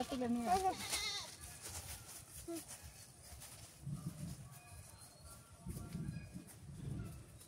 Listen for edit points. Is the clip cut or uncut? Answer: uncut